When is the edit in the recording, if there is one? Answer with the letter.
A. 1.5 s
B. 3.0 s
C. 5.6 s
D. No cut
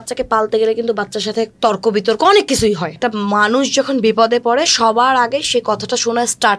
B